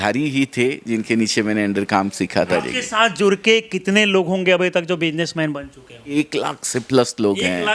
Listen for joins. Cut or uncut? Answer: cut